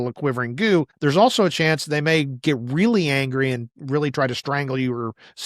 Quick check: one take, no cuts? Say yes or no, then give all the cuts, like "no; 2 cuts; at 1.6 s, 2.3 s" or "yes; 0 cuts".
no; 1 cut; at 0.9 s